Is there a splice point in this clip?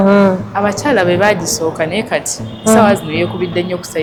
no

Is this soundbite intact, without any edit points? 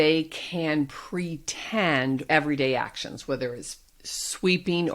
no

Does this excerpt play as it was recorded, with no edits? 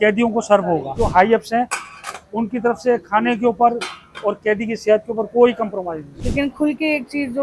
no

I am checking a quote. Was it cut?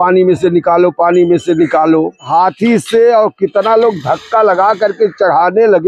yes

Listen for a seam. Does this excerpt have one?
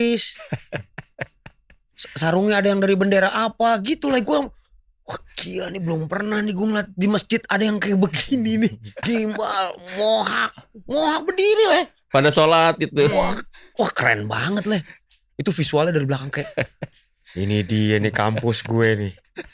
no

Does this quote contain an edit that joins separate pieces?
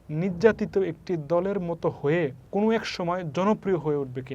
yes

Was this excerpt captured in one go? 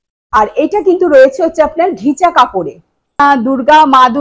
no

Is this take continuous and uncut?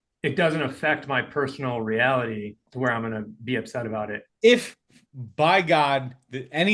no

